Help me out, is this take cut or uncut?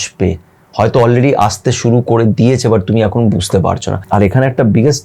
cut